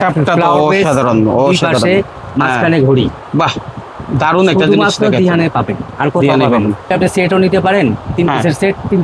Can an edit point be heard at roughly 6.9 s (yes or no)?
yes